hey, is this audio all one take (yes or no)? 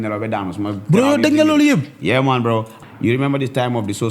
no